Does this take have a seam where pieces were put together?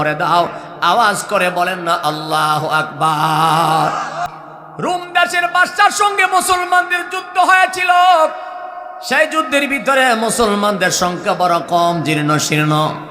yes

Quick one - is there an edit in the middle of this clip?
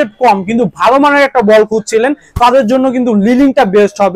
no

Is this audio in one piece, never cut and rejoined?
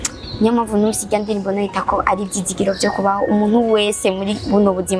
yes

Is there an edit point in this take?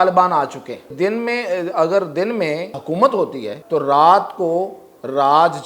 yes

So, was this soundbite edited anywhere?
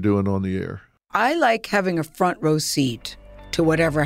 no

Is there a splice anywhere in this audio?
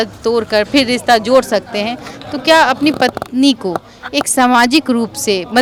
no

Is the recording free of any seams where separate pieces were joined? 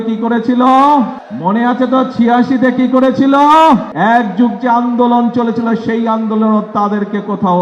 no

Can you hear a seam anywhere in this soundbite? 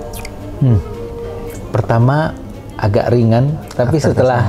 yes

